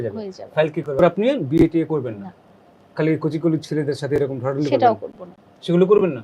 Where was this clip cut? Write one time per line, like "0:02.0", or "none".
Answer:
0:01.0